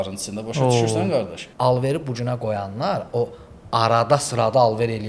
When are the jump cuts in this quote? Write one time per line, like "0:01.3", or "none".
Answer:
0:01.4